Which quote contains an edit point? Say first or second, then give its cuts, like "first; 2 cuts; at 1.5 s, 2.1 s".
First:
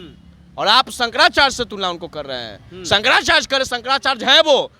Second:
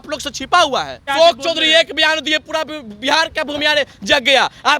second; 1 cut; at 1.0 s